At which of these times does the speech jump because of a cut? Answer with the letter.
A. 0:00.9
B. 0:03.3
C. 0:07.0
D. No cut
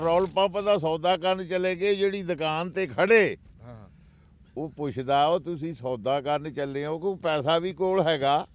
D